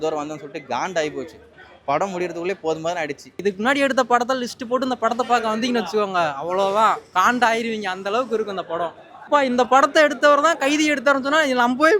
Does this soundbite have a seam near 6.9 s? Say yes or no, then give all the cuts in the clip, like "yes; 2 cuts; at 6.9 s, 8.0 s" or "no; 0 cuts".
no; 2 cuts; at 3.3 s, 9.1 s